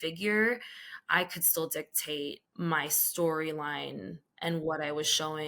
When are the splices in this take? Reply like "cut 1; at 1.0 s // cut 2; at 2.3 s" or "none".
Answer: none